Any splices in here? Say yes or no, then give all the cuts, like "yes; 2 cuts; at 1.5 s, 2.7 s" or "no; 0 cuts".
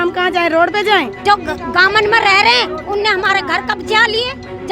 yes; 1 cut; at 1.1 s